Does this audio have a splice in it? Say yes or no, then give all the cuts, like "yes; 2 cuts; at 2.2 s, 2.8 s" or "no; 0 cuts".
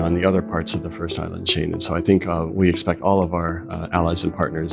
no; 0 cuts